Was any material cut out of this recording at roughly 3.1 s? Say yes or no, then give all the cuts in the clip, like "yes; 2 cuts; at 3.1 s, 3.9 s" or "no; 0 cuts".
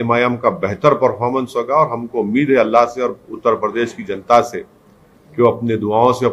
no; 0 cuts